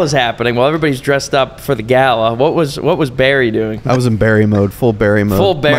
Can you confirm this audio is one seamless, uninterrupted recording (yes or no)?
no